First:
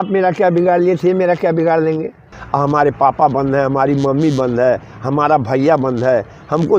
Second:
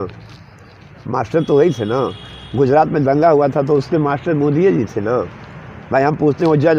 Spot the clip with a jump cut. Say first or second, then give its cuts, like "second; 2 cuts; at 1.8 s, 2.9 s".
first; 1 cut; at 2.4 s